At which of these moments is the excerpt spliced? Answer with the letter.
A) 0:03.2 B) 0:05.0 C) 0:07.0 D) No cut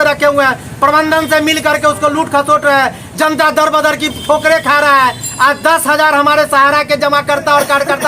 D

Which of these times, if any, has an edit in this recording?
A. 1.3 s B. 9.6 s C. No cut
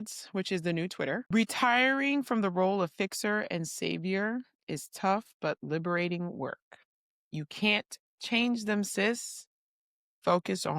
A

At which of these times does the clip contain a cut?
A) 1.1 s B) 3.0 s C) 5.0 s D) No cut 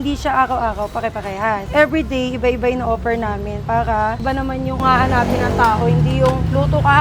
D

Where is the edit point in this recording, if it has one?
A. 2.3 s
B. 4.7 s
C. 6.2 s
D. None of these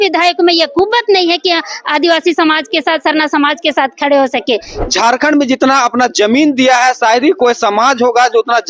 B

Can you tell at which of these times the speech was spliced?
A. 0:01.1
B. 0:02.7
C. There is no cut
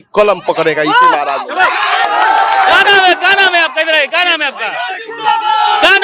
C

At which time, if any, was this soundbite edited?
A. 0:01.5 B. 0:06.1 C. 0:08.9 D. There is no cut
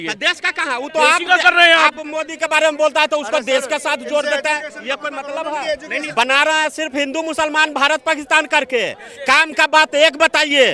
B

